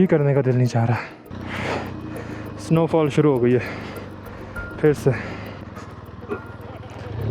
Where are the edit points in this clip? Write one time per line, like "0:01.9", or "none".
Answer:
0:01.3
0:05.6